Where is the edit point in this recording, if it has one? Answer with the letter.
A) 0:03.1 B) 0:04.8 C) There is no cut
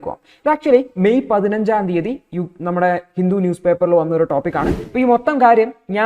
B